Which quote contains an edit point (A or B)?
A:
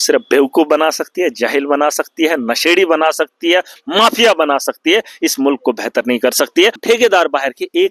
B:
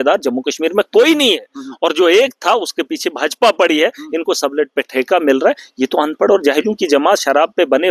A